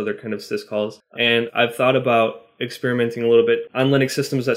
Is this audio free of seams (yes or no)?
no